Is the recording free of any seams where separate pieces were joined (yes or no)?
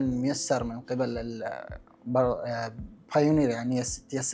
yes